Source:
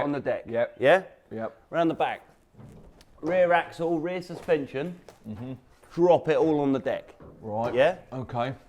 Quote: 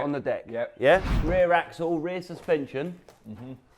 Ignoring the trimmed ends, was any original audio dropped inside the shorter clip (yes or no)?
yes